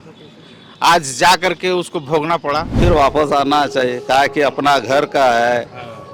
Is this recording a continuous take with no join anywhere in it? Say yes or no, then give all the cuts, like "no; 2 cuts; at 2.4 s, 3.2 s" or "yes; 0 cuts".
no; 1 cut; at 2.8 s